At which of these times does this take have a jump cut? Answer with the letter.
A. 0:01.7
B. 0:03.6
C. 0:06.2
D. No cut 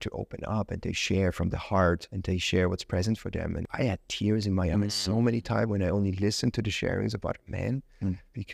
B